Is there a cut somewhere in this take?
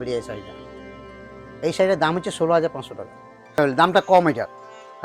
yes; 1 cut; at 3.6 s

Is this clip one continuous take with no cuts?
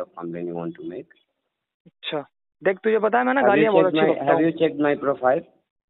no; 1 cut; at 2.4 s

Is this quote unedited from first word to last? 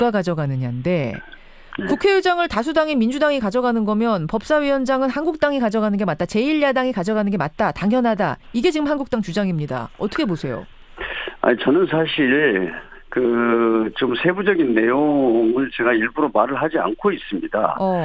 yes; 0 cuts

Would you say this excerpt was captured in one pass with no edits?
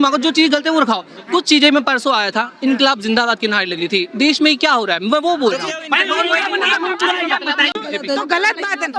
no; 1 cut; at 7.8 s

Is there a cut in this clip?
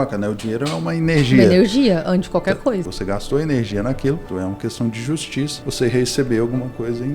yes; 3 cuts; at 2.8 s, 4.2 s, 5.6 s

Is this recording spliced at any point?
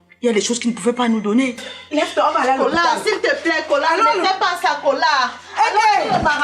yes; 1 cut; at 1.7 s

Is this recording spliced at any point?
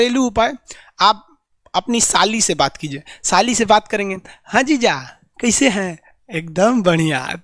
no; 0 cuts

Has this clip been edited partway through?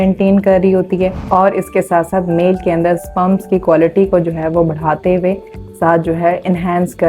yes; 1 cut; at 1.2 s

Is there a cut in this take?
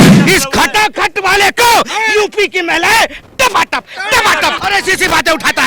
yes; 1 cut; at 4.6 s

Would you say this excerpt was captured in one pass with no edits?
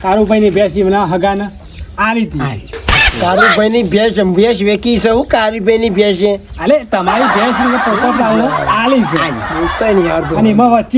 yes; 0 cuts

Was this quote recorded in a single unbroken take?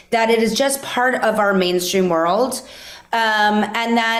yes; 0 cuts

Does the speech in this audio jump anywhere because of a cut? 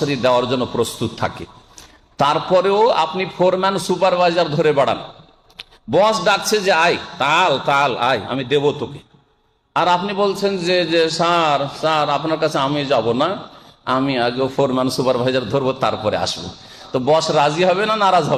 no; 0 cuts

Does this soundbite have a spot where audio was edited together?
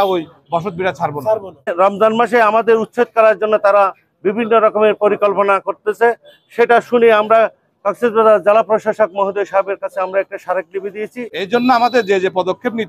yes; 2 cuts; at 1.7 s, 11.4 s

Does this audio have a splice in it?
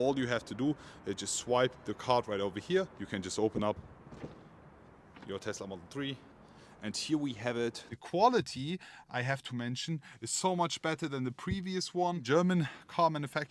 yes; 4 cuts; at 3.0 s, 6.3 s, 7.9 s, 12.2 s

